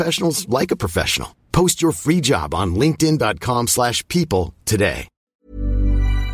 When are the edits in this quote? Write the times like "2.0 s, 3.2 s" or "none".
5.4 s